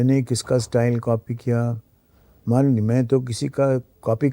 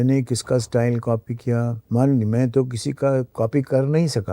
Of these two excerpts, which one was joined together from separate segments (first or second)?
second